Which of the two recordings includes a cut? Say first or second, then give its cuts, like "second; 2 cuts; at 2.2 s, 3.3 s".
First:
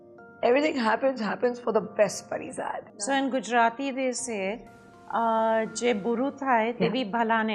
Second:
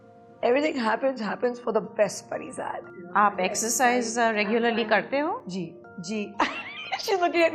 second; 1 cut; at 2.9 s